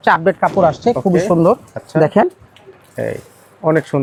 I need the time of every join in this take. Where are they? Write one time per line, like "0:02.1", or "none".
none